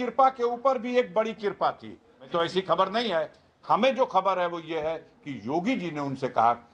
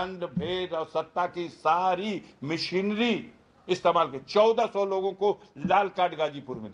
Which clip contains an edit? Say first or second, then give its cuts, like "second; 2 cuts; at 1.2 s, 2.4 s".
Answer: first; 1 cut; at 2.3 s